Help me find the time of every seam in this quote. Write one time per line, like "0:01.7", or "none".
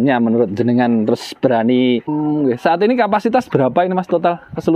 0:02.1